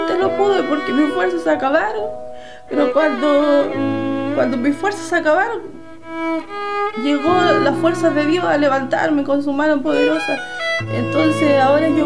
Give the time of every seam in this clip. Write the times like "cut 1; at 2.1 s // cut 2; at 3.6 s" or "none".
none